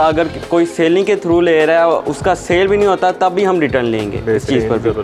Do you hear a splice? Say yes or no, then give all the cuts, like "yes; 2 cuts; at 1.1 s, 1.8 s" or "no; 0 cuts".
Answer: no; 0 cuts